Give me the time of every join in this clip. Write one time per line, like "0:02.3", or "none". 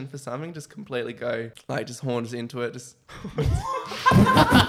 0:01.6

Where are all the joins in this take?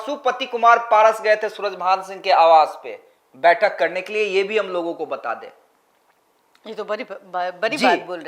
none

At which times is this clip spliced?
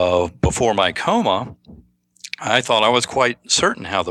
none

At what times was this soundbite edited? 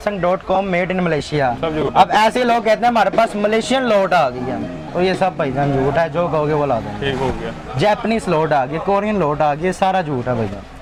none

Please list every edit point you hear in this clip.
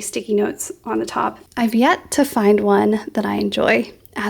0:01.4

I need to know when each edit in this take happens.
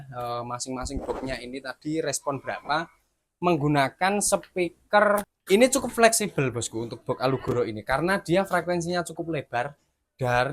0:05.3

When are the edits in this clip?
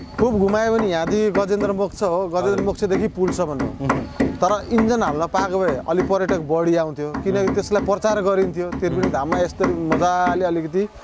none

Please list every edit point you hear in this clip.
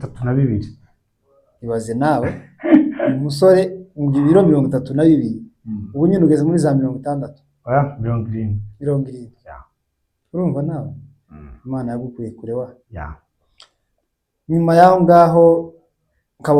none

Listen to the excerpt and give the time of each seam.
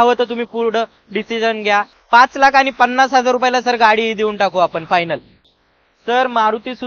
none

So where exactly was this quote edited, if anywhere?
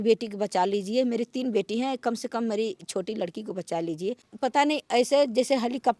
0:04.3

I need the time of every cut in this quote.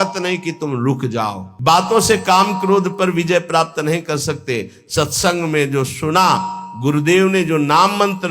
0:01.5

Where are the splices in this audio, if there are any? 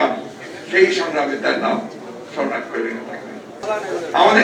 0:03.5

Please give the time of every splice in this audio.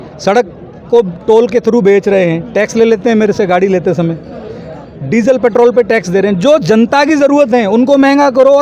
none

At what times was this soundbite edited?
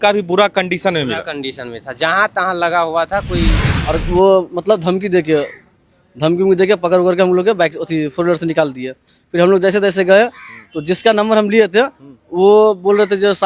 0:03.7

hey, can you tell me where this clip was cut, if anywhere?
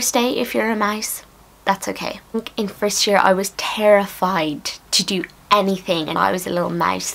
0:02.3
0:06.1

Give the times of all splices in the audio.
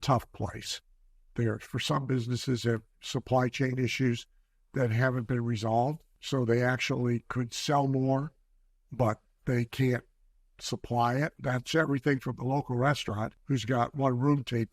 0:01.3
0:06.1
0:11.4
0:13.3

